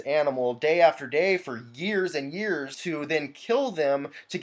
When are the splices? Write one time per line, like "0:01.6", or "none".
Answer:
0:02.8